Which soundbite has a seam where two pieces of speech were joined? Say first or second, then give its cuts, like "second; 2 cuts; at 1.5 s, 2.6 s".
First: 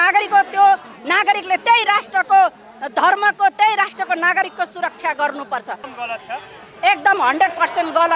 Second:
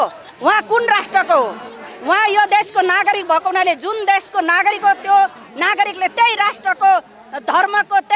first; 1 cut; at 5.9 s